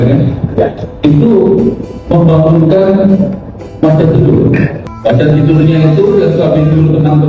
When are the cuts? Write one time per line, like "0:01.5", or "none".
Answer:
0:04.8